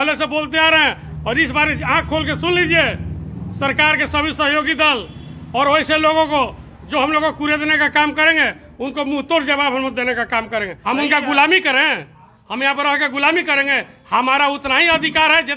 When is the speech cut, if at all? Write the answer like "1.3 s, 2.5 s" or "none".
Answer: 10.8 s